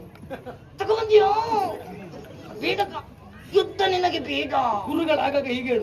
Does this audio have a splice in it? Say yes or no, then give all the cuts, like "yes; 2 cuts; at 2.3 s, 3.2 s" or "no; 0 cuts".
no; 0 cuts